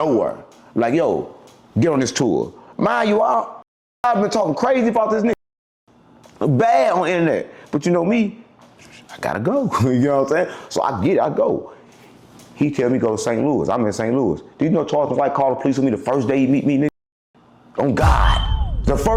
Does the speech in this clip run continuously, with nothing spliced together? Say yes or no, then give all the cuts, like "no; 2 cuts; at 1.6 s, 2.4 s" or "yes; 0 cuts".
yes; 0 cuts